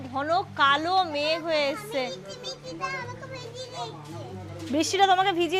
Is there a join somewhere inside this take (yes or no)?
no